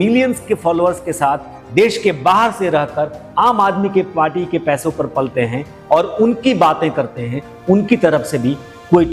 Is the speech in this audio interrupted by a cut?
no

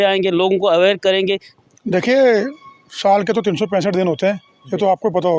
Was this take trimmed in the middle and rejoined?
yes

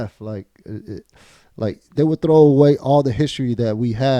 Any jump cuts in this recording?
no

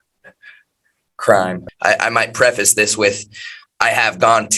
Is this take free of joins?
no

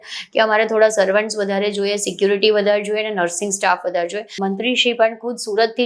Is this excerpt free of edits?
no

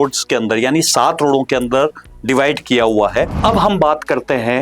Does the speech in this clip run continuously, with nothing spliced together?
no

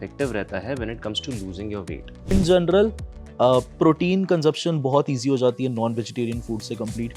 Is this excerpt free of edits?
no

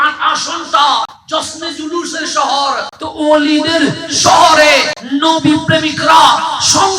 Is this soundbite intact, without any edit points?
no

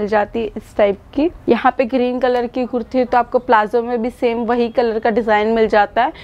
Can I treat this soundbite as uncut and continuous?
no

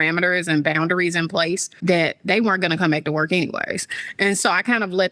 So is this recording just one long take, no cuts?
no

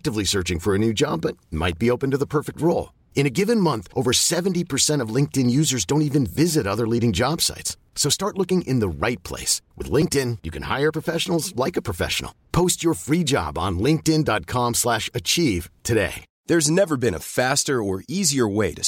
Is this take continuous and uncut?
no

